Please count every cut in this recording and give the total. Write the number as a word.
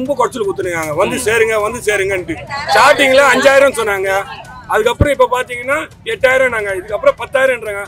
zero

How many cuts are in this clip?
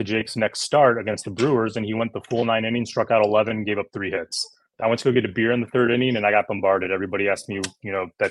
one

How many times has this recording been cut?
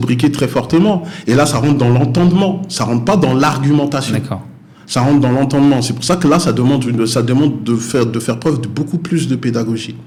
zero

